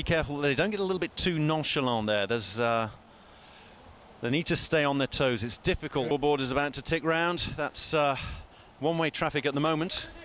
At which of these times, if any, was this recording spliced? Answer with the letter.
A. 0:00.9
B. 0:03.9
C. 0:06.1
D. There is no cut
C